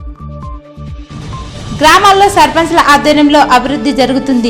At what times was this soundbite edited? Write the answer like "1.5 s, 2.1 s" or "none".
1.4 s